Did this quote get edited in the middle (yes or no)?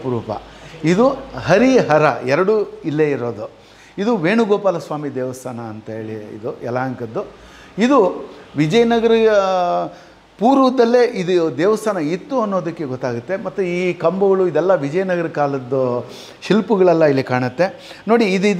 no